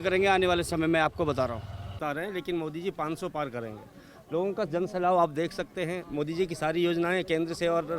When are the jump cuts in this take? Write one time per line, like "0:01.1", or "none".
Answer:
0:02.0